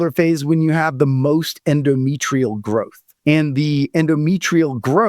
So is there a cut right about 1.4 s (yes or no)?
no